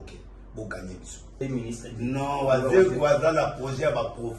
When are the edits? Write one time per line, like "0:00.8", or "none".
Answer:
0:01.3

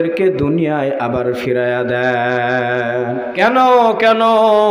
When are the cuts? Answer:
0:03.3

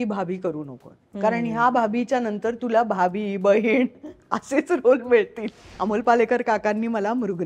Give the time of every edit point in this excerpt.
0:05.7

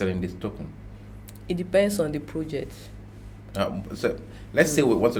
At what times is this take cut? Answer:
none

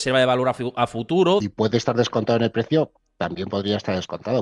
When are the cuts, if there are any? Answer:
0:01.4

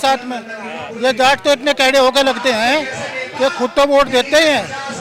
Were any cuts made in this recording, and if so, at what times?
none

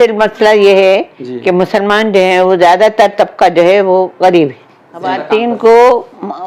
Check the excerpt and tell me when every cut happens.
0:05.1

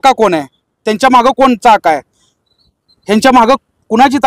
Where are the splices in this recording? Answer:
none

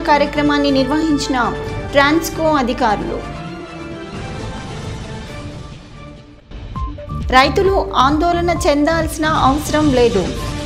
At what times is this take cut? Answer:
none

